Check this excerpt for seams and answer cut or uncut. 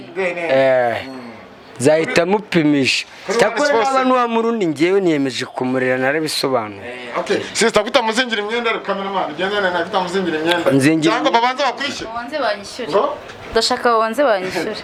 uncut